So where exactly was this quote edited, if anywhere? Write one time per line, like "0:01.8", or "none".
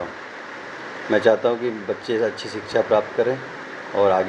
none